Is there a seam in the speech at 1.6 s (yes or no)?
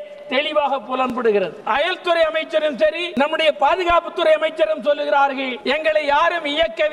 yes